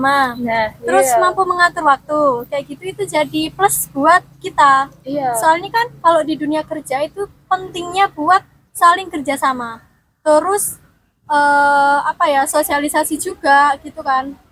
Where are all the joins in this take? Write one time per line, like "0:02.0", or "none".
none